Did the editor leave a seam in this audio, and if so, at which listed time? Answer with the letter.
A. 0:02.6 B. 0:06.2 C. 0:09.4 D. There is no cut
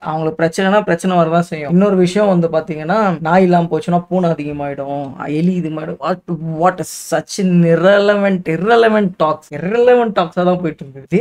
D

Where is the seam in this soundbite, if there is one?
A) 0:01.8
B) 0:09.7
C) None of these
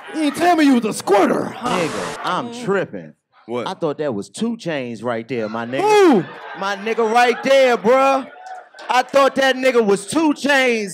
A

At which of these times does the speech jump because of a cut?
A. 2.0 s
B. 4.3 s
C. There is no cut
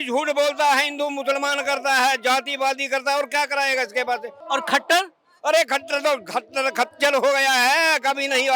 B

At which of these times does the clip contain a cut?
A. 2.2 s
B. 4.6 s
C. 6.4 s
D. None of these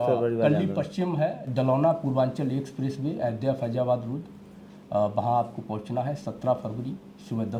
D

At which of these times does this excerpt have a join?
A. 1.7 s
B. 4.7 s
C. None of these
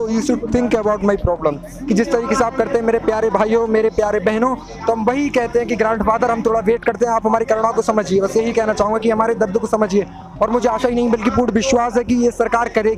A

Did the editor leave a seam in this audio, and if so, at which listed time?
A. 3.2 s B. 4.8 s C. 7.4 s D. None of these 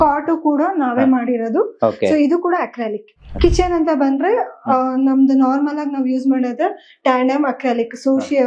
A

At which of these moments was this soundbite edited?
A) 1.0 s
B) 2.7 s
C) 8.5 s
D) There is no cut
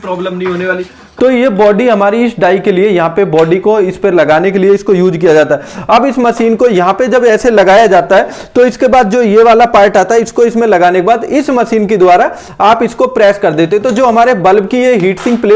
A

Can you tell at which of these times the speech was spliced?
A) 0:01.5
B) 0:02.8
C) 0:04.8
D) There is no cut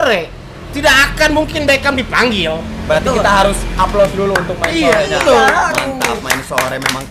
D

